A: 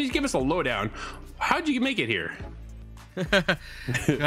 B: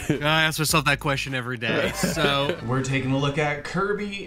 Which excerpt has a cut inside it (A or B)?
B